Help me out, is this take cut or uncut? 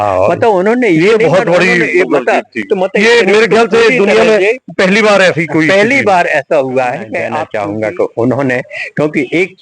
cut